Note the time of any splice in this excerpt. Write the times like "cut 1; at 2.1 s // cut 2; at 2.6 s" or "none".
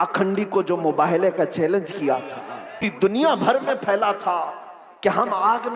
cut 1; at 2.9 s